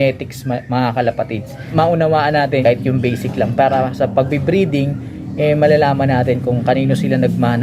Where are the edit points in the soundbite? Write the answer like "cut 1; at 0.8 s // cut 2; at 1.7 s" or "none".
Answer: cut 1; at 1.5 s // cut 2; at 2.6 s